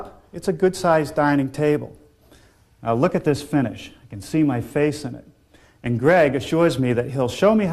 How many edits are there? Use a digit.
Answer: 0